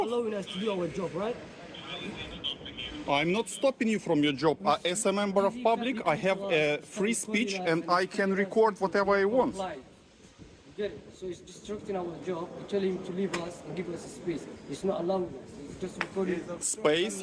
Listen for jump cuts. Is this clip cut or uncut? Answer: uncut